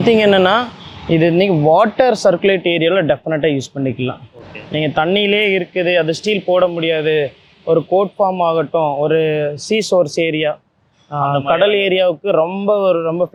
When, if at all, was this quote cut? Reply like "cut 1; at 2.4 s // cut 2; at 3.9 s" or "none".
none

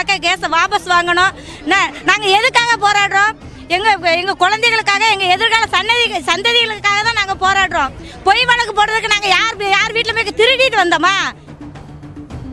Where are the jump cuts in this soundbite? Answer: cut 1; at 11.4 s

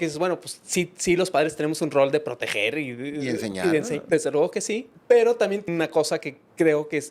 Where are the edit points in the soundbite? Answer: cut 1; at 4.0 s // cut 2; at 4.9 s // cut 3; at 5.7 s

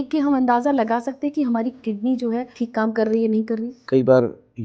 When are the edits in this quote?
cut 1; at 2.5 s // cut 2; at 3.8 s

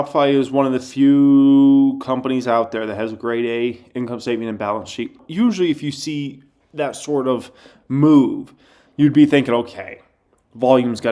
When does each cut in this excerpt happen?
cut 1; at 5.2 s

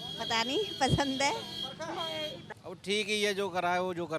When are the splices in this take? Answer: cut 1; at 2.4 s

